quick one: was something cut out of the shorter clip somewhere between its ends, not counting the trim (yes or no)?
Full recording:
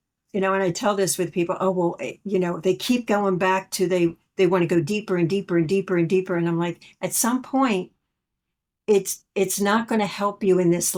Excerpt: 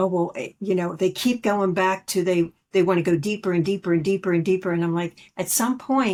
no